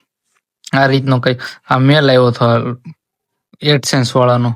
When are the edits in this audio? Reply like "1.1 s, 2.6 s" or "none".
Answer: none